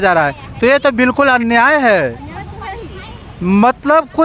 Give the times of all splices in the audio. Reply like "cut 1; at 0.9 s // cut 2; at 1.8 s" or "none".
none